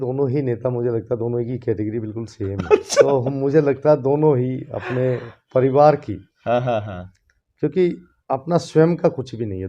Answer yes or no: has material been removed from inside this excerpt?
yes